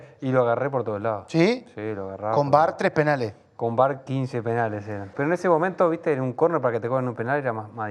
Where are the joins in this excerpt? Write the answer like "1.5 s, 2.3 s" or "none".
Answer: 5.1 s